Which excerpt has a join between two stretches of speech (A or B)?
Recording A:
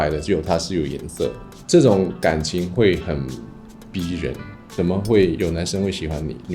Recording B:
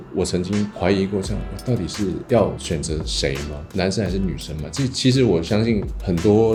A